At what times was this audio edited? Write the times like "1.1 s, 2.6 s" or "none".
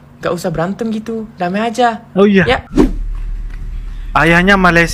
2.7 s